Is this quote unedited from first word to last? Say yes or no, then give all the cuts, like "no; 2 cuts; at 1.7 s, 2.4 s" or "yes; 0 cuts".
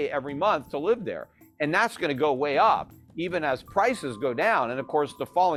yes; 0 cuts